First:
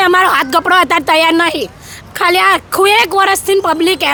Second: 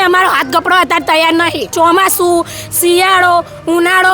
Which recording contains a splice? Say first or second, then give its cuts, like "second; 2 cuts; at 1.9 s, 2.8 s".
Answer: second; 1 cut; at 1.7 s